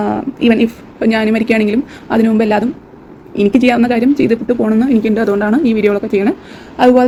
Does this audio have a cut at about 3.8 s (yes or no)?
no